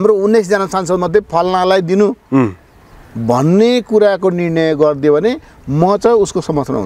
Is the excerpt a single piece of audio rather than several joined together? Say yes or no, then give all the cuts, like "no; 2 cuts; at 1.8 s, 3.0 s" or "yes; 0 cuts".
yes; 0 cuts